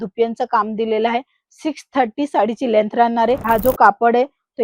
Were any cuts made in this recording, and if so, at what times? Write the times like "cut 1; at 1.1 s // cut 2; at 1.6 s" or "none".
cut 1; at 3.4 s